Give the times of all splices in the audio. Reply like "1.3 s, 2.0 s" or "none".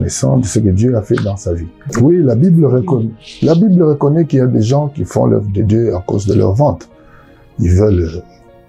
1.7 s